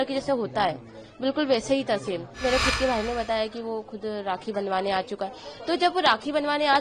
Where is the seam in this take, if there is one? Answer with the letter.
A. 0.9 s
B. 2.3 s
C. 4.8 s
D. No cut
B